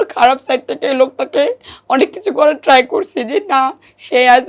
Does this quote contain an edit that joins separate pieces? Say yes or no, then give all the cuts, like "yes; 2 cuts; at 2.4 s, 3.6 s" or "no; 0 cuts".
no; 0 cuts